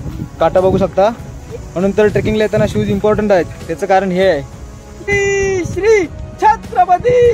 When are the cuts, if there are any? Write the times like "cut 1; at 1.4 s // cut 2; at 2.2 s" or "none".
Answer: cut 1; at 5.1 s